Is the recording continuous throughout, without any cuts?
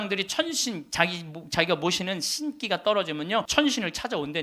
no; 1 cut; at 3.5 s

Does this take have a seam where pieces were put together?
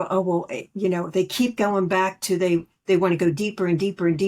no; 0 cuts

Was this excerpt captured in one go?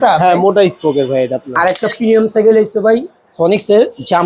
no; 1 cut; at 1.4 s

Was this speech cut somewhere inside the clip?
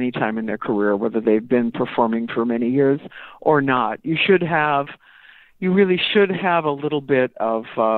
no; 0 cuts

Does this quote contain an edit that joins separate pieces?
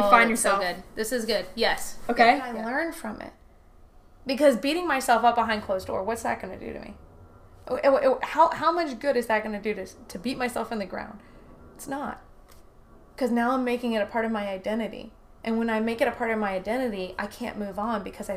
yes; 1 cut; at 2.6 s

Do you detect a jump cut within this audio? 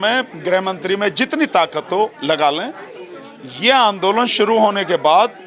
no; 0 cuts

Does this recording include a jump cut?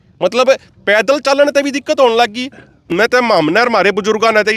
yes; 1 cut; at 2.9 s

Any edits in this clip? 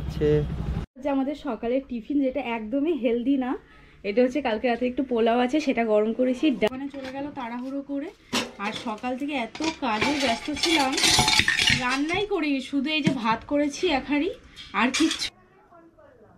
yes; 3 cuts; at 1.3 s, 6.7 s, 15.2 s

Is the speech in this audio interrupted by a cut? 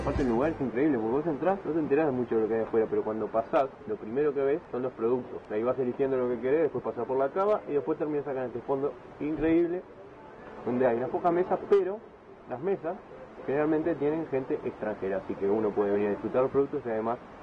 yes; 4 cuts; at 1.6 s, 3.8 s, 4.7 s, 5.4 s

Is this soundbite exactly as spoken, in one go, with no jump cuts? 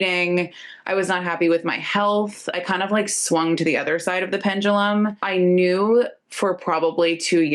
no; 1 cut; at 5.2 s

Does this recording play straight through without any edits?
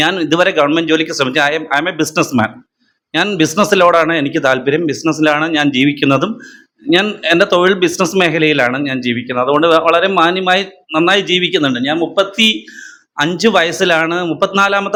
yes; 0 cuts

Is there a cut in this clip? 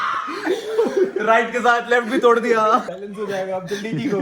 yes; 1 cut; at 2.9 s

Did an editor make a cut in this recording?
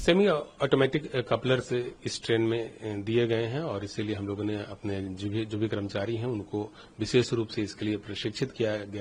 no; 0 cuts

